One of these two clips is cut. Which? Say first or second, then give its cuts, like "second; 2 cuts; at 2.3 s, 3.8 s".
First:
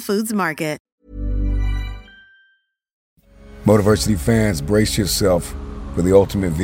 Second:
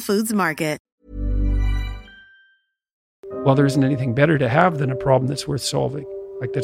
second; 1 cut; at 3.4 s